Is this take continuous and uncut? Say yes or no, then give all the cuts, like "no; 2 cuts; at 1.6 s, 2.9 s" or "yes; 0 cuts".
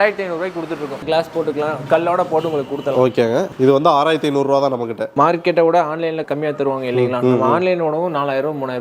no; 3 cuts; at 0.9 s, 5.0 s, 6.2 s